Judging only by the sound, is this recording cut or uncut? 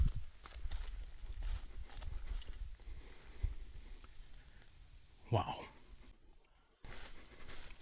uncut